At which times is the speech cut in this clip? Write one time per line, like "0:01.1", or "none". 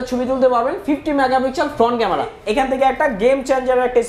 0:02.4